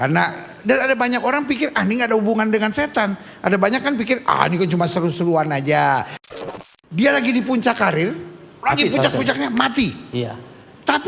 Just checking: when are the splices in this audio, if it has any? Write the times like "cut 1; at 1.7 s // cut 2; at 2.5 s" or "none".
cut 1; at 6.2 s

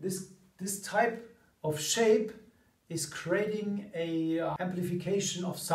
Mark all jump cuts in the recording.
cut 1; at 4.6 s

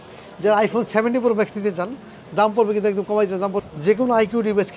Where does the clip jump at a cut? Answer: cut 1; at 3.6 s

